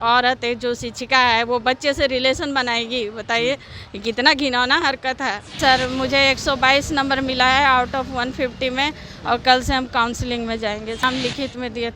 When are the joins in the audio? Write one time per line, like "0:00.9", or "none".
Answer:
0:05.6
0:11.0

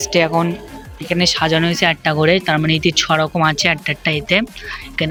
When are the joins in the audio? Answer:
none

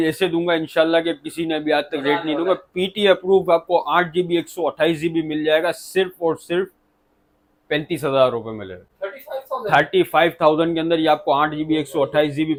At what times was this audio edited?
none

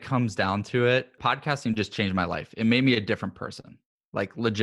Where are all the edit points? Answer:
0:01.2

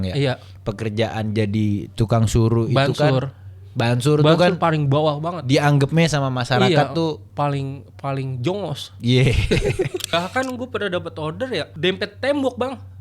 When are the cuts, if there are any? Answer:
0:10.1

